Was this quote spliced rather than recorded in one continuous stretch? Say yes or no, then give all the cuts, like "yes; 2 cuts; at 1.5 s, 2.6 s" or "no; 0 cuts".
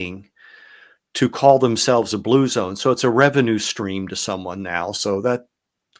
no; 0 cuts